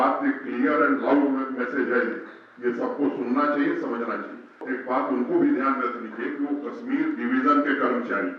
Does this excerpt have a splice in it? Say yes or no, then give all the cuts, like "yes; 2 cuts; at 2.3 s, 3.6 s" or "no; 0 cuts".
yes; 1 cut; at 4.6 s